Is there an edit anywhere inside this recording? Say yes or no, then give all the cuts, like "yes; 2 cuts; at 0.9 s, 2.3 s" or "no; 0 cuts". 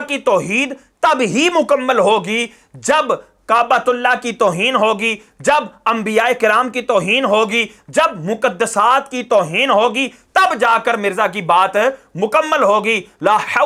no; 0 cuts